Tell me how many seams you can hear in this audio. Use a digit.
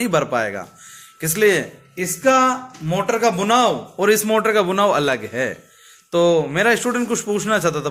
0